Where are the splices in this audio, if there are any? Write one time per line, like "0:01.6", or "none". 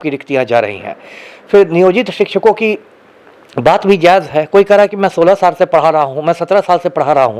none